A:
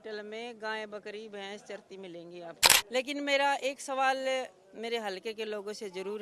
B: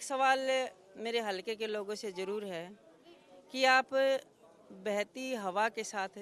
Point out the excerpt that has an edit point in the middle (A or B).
A